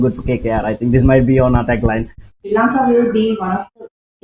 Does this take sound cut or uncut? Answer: cut